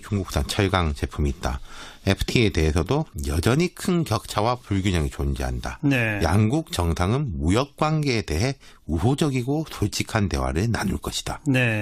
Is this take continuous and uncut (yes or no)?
no